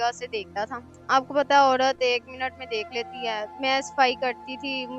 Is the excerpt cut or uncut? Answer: cut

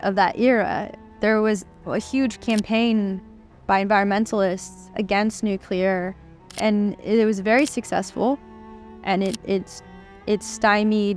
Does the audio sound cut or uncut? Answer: cut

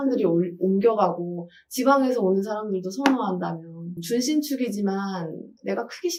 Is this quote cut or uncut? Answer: uncut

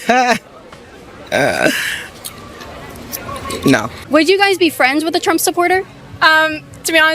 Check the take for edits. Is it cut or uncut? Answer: cut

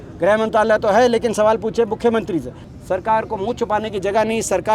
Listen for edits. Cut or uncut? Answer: cut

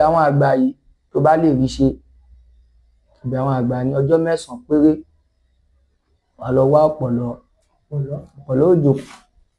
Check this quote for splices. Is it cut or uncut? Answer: uncut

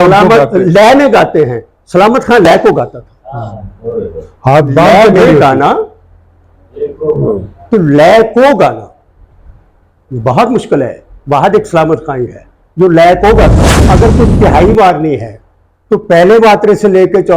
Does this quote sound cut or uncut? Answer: cut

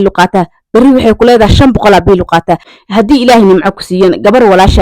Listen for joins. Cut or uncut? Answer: cut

